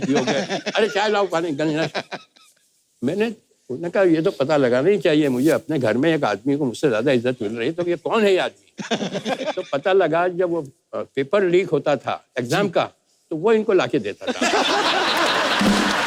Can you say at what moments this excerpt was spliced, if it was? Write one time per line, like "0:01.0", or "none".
none